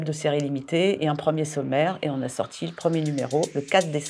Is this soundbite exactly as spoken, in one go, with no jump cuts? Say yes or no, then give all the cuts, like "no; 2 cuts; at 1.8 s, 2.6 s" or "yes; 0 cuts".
yes; 0 cuts